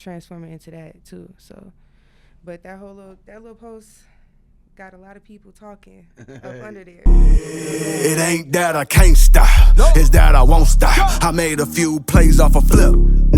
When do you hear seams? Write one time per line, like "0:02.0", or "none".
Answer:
0:07.1